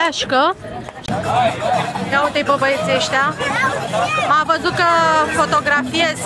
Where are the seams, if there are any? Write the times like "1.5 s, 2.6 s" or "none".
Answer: 1.0 s

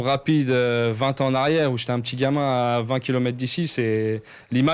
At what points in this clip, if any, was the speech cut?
none

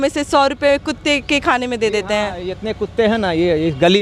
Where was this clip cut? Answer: none

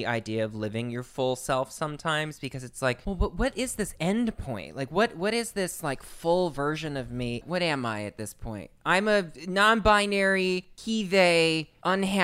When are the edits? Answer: 3.0 s, 7.4 s, 9.4 s

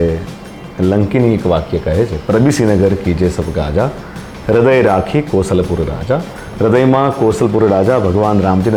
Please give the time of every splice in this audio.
none

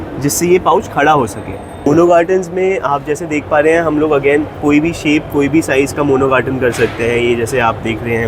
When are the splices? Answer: 1.7 s

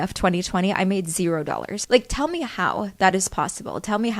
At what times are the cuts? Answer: 1.8 s

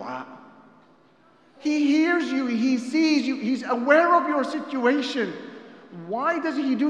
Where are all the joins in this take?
1.5 s

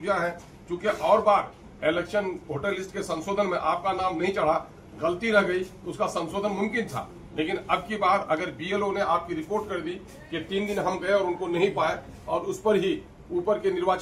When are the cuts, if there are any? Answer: none

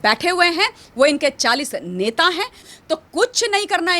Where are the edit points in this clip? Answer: 2.6 s

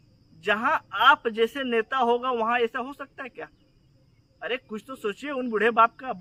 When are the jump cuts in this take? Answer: none

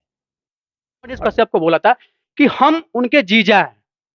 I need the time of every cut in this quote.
1.2 s

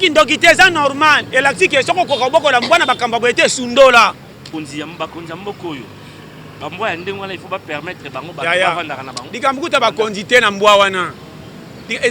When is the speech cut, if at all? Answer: 4.5 s

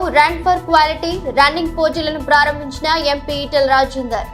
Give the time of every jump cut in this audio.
none

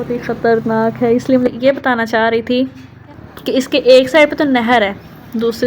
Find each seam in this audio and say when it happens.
1.5 s

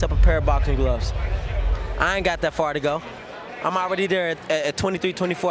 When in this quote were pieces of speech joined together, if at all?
none

